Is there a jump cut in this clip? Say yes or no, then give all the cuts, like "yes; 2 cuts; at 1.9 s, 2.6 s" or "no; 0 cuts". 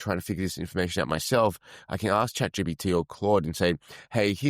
no; 0 cuts